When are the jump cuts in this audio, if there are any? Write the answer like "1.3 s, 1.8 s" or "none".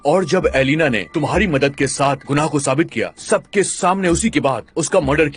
none